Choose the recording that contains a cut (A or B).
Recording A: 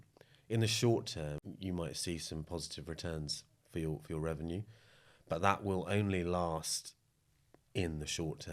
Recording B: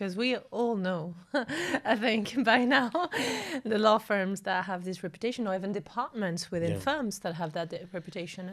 A